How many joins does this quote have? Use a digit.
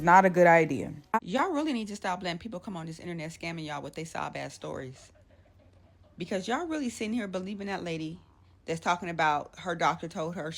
1